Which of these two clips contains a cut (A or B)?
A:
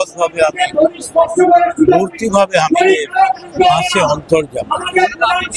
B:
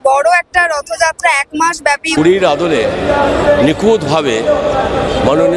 B